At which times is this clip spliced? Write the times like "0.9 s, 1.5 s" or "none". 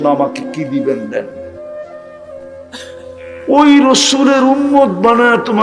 none